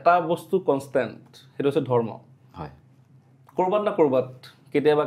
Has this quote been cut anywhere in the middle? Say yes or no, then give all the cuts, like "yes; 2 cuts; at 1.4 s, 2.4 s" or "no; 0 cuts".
no; 0 cuts